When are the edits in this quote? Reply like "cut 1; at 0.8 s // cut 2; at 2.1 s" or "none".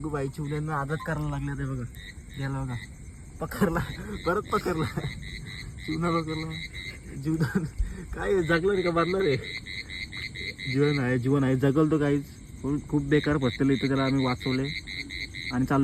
none